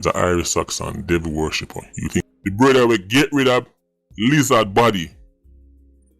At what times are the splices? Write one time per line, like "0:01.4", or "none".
0:02.3